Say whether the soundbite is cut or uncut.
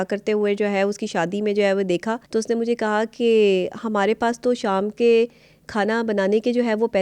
cut